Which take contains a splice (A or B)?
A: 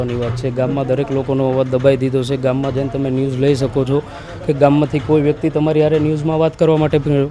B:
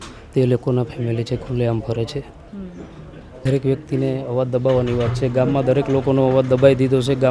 B